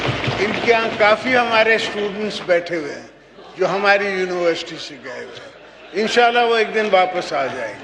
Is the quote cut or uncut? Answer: uncut